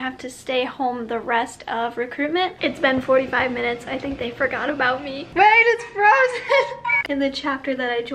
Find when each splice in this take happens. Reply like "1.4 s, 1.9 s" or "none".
2.6 s, 7.0 s